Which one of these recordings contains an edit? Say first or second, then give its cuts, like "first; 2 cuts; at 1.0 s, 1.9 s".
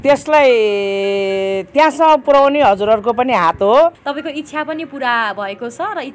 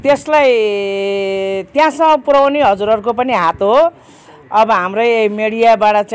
first; 1 cut; at 4.1 s